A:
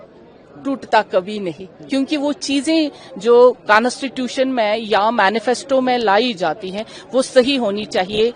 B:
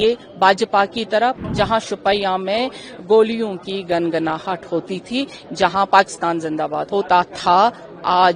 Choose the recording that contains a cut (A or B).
B